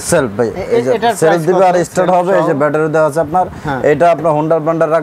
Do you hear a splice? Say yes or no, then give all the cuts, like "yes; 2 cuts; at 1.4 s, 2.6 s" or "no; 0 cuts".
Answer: no; 0 cuts